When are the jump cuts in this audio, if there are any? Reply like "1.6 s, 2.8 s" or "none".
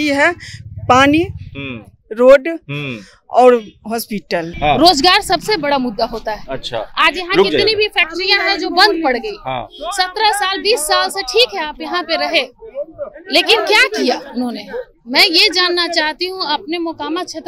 4.5 s